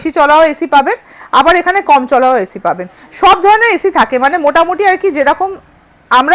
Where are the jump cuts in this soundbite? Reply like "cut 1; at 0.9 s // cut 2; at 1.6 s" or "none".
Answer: none